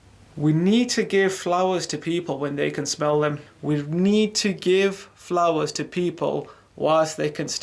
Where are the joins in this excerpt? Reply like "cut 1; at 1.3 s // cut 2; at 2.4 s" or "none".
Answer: cut 1; at 3.5 s